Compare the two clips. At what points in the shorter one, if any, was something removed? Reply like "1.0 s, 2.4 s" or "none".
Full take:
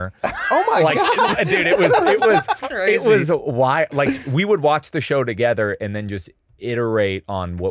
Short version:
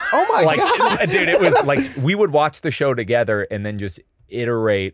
1.6 s

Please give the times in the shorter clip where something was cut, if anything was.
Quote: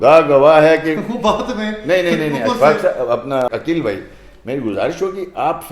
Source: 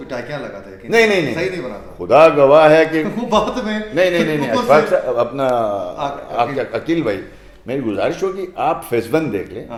3.5 s

